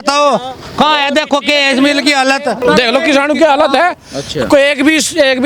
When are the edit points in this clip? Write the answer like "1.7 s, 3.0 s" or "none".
2.6 s